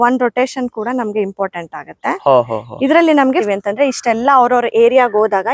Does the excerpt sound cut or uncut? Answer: cut